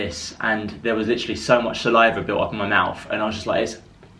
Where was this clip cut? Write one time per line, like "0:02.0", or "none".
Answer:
none